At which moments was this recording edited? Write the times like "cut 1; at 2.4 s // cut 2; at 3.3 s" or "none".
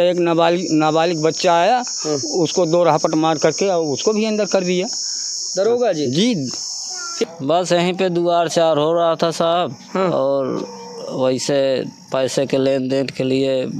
cut 1; at 7.2 s